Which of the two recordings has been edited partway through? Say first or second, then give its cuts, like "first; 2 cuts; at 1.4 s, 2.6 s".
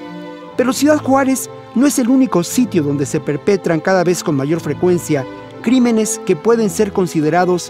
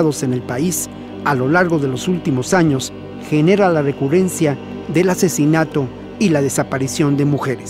second; 1 cut; at 6.0 s